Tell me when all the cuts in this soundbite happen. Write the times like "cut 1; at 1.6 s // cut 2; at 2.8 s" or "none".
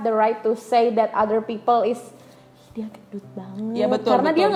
none